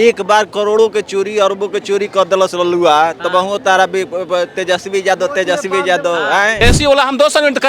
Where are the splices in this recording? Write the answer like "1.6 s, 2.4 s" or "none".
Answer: 6.6 s